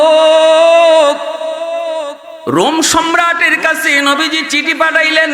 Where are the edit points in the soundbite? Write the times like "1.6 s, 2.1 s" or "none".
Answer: 2.2 s